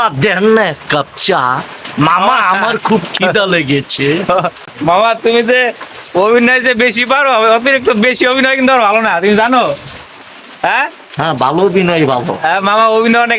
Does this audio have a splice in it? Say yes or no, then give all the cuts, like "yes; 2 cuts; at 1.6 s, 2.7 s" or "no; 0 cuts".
no; 0 cuts